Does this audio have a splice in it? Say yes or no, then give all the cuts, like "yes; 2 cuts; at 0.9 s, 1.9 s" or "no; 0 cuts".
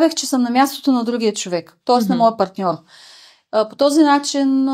no; 0 cuts